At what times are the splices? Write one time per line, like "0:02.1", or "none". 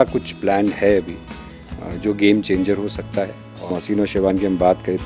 0:03.7